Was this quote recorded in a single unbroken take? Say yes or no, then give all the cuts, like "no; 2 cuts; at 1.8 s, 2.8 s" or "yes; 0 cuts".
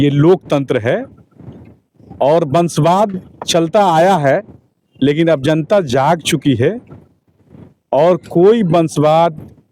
yes; 0 cuts